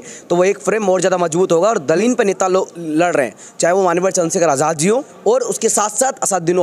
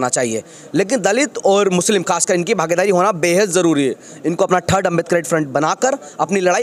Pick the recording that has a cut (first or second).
first